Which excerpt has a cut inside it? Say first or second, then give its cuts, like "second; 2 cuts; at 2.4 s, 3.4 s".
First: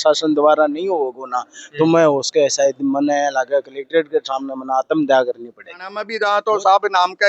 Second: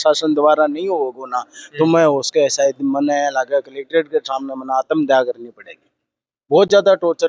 first; 1 cut; at 6.0 s